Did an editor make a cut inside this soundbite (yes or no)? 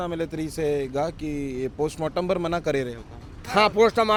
no